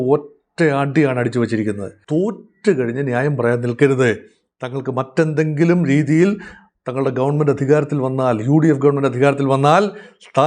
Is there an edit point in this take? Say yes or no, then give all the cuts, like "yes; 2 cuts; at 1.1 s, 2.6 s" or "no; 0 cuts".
yes; 1 cut; at 1.9 s